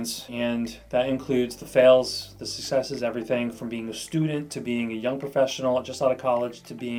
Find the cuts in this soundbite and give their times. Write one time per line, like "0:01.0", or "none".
none